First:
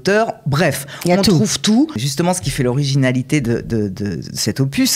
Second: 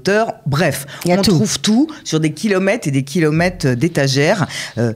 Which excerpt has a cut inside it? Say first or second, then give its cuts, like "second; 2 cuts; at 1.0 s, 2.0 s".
first; 1 cut; at 2.0 s